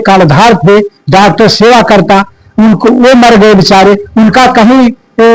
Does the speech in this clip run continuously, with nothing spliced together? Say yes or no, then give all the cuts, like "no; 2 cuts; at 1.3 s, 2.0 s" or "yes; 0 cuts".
yes; 0 cuts